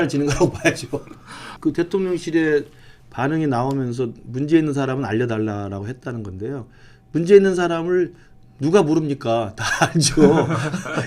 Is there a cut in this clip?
yes; 1 cut; at 1.5 s

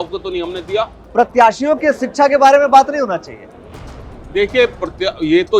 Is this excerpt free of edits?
no; 1 cut; at 1.0 s

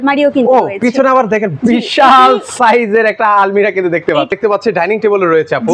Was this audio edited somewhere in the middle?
yes; 1 cut; at 4.3 s

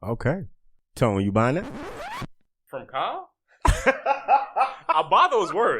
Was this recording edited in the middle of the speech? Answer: yes; 1 cut; at 2.2 s

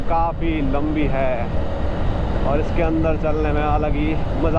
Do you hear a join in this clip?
no; 0 cuts

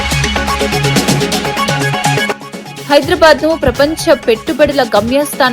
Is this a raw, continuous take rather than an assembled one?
no; 1 cut; at 2.4 s

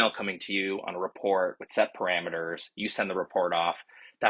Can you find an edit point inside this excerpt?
no; 0 cuts

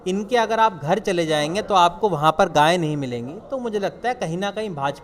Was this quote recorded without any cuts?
yes; 0 cuts

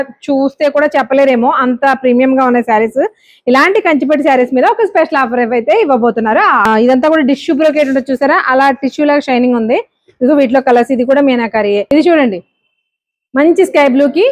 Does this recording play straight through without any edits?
no; 2 cuts; at 6.7 s, 11.8 s

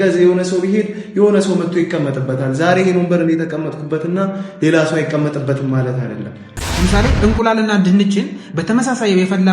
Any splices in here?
yes; 1 cut; at 6.4 s

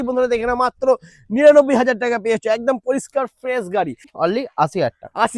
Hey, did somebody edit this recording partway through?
yes; 1 cut; at 4.0 s

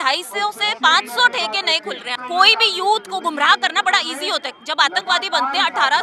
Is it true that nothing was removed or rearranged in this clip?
no; 1 cut; at 2.1 s

